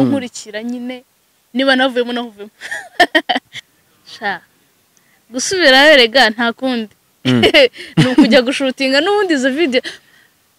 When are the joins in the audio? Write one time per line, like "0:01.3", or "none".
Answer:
0:03.6